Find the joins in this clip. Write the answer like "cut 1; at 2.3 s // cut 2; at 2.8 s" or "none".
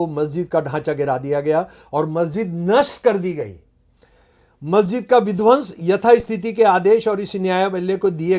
none